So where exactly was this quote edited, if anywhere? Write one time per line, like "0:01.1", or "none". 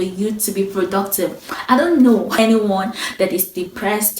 0:02.3